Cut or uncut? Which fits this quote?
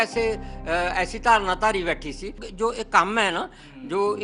cut